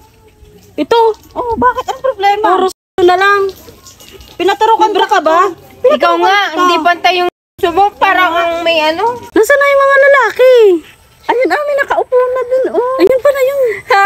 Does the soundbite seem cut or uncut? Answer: cut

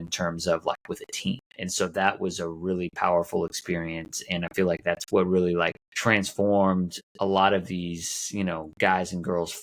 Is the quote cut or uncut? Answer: cut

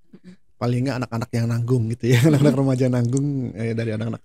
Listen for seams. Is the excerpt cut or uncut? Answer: uncut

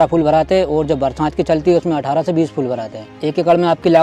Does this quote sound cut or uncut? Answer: cut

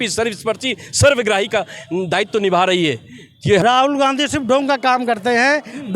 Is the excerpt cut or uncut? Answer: cut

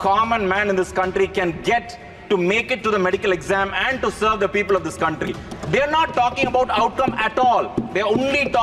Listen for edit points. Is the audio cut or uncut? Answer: uncut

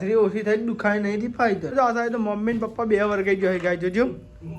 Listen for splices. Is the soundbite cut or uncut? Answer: cut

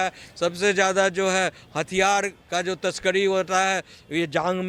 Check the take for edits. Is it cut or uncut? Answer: uncut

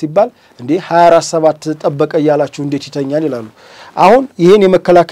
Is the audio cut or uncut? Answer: uncut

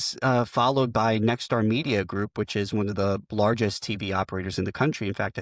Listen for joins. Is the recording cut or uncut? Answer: uncut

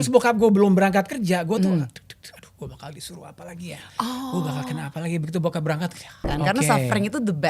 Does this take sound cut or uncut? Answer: cut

